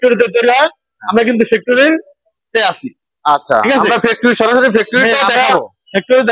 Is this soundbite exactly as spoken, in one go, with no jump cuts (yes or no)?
yes